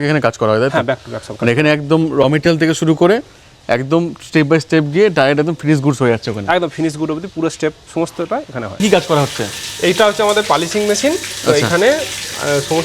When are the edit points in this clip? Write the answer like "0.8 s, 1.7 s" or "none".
8.8 s